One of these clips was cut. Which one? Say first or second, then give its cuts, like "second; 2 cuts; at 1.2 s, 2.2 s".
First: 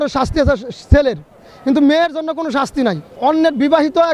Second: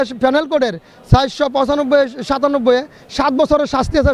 first; 1 cut; at 3.1 s